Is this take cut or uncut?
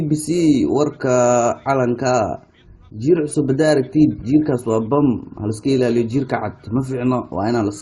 cut